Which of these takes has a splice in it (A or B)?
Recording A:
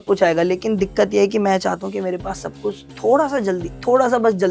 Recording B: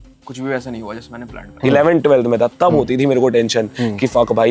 B